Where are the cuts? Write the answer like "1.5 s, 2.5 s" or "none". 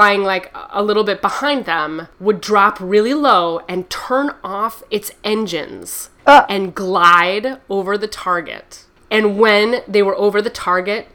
none